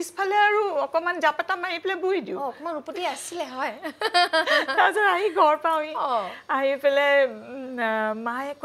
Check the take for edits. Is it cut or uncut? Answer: uncut